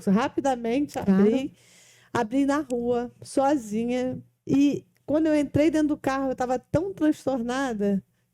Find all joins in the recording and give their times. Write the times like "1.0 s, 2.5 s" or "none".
4.3 s